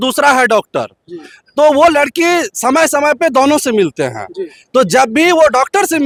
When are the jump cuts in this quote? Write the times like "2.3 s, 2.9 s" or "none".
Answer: none

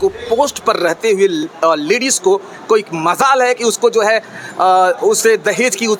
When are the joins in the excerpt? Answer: none

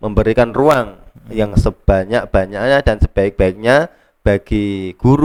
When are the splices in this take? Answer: none

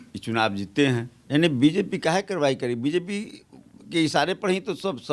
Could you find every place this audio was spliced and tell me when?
1.1 s

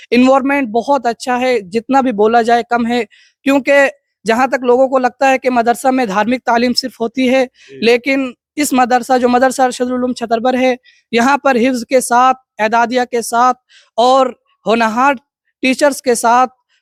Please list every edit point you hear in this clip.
none

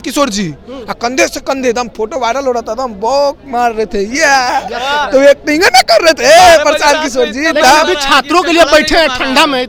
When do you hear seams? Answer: none

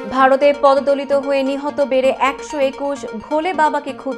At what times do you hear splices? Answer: none

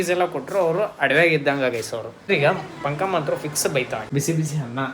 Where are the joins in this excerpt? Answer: 2.3 s, 4.0 s

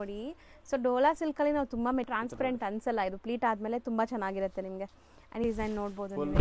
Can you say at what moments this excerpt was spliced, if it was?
2.1 s, 5.4 s

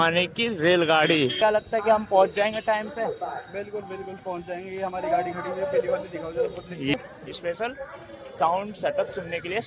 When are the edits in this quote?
1.4 s, 6.9 s

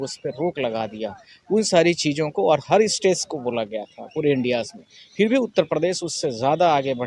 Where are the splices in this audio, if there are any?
none

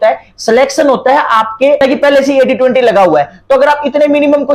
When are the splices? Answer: 1.8 s

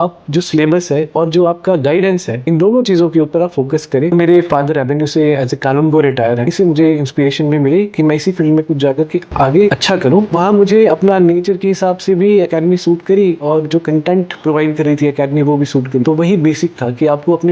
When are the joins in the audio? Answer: 1.1 s, 2.3 s, 4.1 s, 6.5 s, 10.3 s, 16.0 s

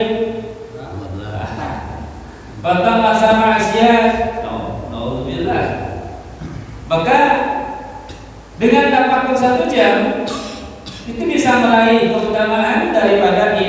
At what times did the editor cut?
none

